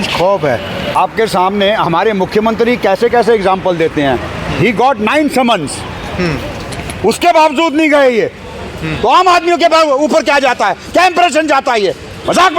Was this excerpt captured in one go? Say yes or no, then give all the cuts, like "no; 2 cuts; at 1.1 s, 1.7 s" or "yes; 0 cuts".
no; 1 cut; at 0.9 s